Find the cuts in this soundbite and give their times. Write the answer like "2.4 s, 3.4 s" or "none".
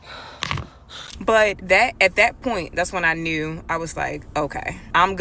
1.1 s